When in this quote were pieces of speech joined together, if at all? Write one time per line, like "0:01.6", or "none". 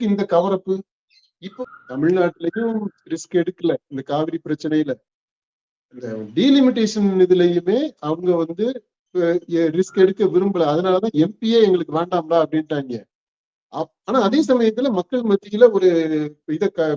0:01.5